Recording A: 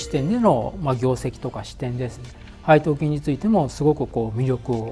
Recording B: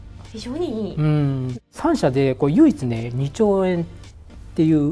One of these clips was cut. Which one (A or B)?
B